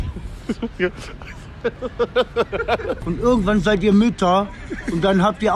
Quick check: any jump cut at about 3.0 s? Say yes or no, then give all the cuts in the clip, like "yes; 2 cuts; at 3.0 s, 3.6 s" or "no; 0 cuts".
yes; 1 cut; at 3.0 s